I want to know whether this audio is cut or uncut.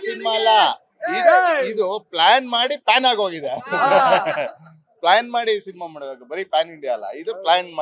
uncut